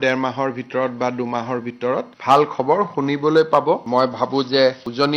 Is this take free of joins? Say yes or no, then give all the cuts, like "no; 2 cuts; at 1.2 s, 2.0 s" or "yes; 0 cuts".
no; 2 cuts; at 2.1 s, 3.8 s